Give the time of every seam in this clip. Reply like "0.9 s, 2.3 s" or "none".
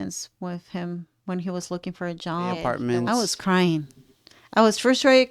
2.8 s